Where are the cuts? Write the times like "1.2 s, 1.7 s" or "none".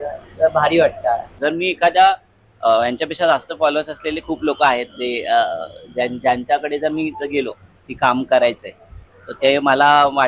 1.3 s